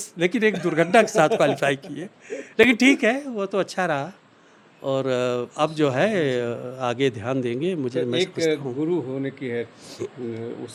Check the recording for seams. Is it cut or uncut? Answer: uncut